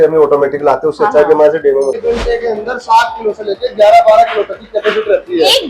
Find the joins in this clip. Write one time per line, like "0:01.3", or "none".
0:02.0